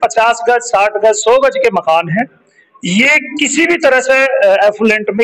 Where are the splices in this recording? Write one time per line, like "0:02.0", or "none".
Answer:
none